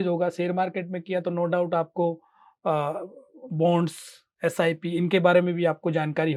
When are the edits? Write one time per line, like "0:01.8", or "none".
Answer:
none